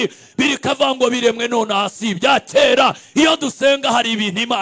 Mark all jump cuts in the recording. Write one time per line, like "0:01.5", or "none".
none